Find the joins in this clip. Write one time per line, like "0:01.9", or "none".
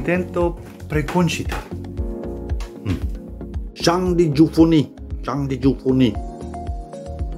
0:01.6
0:03.8
0:06.1